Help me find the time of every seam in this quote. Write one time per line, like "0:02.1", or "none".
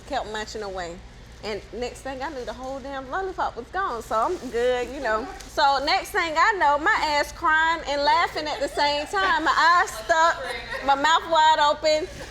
0:05.4

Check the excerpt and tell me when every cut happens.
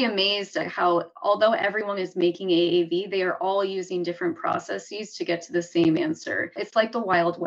0:06.6

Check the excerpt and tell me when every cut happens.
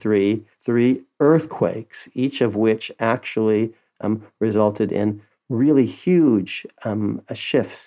none

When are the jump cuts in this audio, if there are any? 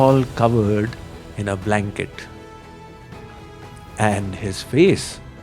0:02.1
0:03.7

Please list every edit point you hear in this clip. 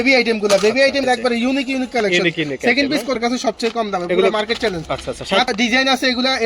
0:01.0
0:03.2
0:05.5

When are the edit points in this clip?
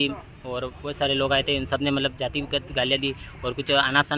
none

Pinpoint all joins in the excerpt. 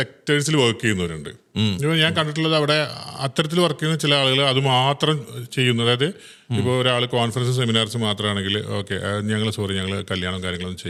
none

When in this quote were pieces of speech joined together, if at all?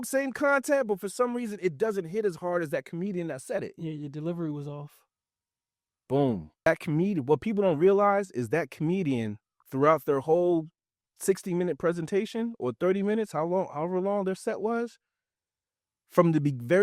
0:06.7

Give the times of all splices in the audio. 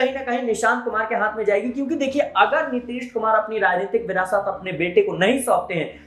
none

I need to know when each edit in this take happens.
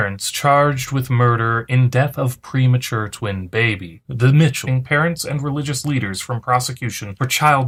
none

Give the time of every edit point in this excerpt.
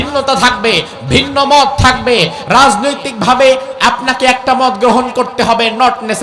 none

